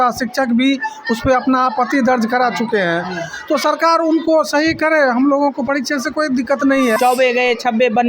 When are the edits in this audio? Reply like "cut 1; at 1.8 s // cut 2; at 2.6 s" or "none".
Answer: cut 1; at 7.0 s